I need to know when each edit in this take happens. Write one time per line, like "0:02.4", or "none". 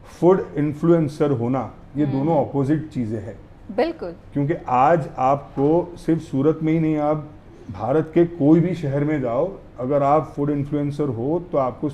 none